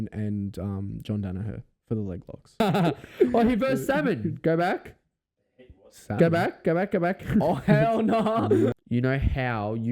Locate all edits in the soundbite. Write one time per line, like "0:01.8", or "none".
0:02.6
0:08.7